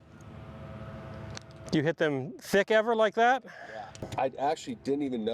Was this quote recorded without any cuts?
no; 2 cuts; at 1.6 s, 4.0 s

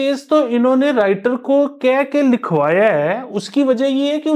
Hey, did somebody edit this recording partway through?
no; 0 cuts

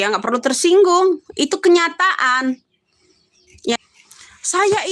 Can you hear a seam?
yes; 1 cut; at 3.8 s

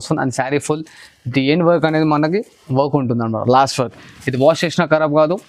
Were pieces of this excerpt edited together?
no; 0 cuts

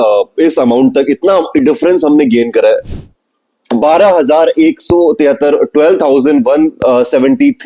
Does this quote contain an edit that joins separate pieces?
yes; 1 cut; at 2.9 s

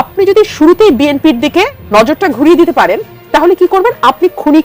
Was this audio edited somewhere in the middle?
yes; 1 cut; at 1.8 s

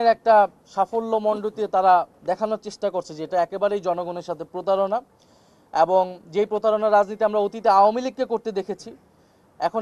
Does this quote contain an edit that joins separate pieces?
no; 0 cuts

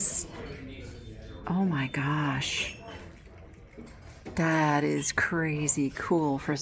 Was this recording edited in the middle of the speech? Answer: no; 0 cuts

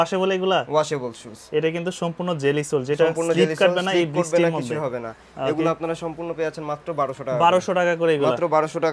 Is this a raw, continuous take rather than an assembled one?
yes; 0 cuts

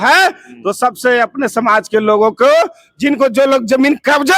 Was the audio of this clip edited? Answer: no; 0 cuts

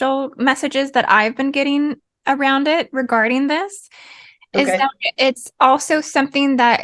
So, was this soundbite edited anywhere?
no; 0 cuts

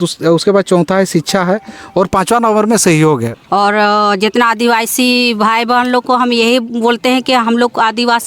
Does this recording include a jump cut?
yes; 1 cut; at 3.3 s

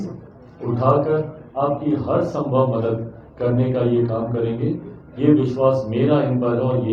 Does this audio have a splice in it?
no; 0 cuts

